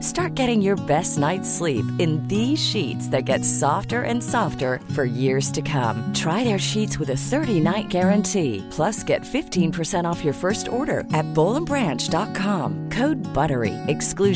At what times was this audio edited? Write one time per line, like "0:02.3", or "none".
none